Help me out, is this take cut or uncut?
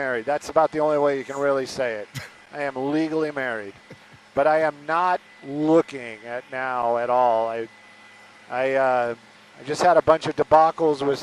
uncut